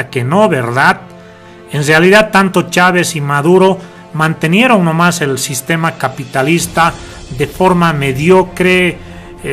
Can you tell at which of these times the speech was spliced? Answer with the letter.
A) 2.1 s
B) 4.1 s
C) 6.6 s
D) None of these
A